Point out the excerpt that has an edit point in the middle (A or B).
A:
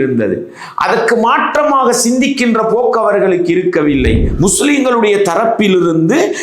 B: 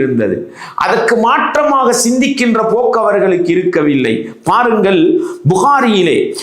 A